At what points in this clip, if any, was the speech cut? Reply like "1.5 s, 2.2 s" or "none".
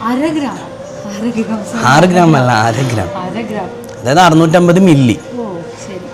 none